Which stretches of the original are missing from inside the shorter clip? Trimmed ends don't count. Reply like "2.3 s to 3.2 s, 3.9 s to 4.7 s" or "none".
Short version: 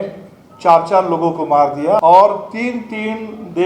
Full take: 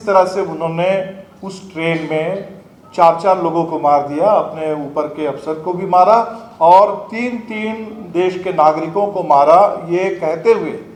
4.3 s to 6.6 s